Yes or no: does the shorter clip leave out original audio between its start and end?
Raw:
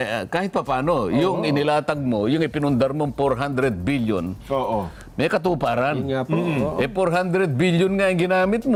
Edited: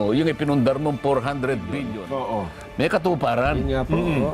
yes